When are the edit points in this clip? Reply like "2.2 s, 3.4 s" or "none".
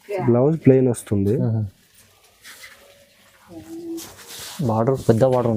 none